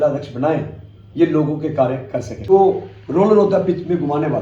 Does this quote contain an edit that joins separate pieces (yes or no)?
yes